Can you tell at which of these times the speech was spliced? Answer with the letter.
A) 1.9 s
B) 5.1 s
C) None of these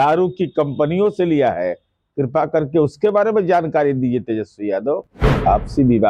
B